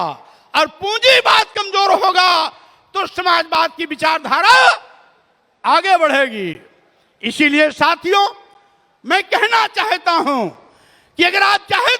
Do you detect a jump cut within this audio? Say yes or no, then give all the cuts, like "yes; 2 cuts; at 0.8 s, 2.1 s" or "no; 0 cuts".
no; 0 cuts